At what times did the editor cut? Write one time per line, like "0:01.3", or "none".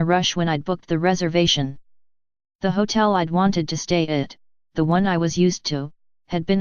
0:04.9